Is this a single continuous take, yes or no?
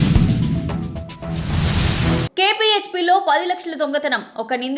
no